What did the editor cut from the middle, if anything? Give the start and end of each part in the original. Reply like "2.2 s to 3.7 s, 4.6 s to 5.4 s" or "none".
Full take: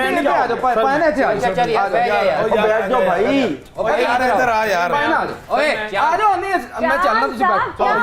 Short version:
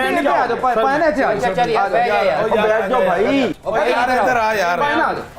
3.6 s to 3.7 s